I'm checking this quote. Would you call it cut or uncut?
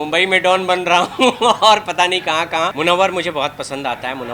cut